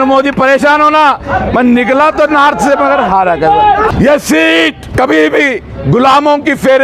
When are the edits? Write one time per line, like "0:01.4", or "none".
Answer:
0:03.9
0:04.8